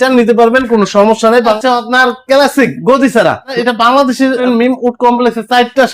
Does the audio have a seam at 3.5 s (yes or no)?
yes